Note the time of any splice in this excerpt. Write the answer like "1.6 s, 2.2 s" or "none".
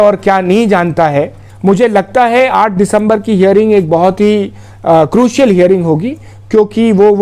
1.4 s